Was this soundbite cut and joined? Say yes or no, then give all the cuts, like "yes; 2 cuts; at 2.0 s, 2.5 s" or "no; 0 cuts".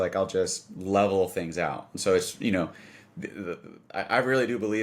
no; 0 cuts